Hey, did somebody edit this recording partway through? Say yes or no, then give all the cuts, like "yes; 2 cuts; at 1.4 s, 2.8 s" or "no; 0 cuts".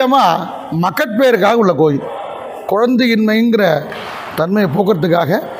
no; 0 cuts